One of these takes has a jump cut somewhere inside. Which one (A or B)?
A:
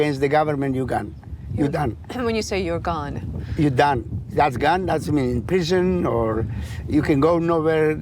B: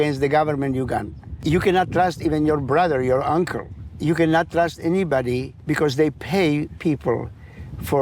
B